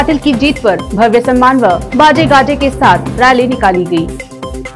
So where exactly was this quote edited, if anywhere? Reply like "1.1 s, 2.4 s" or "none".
none